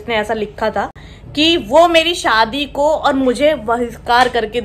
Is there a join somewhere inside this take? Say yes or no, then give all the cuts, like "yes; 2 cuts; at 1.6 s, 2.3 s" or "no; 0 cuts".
no; 0 cuts